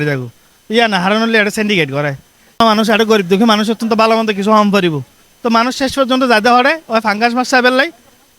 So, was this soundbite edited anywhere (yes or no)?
yes